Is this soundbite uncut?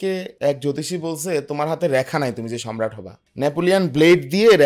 yes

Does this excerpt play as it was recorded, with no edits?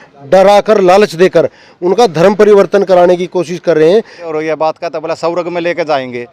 no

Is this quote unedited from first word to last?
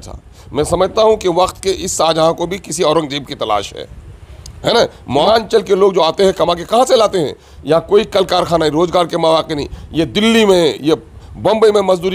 no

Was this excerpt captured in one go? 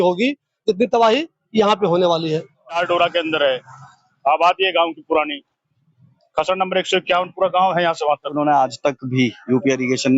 no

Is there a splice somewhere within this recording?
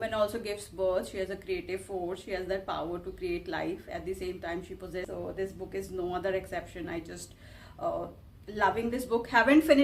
yes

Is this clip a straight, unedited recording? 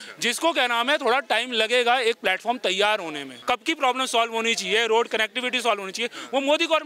no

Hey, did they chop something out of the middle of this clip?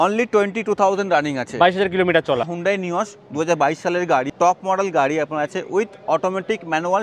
yes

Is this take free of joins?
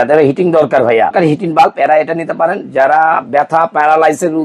no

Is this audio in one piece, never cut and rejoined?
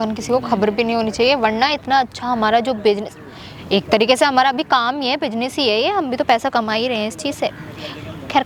yes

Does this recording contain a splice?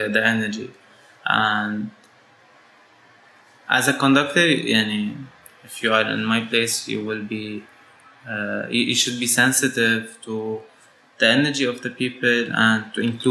no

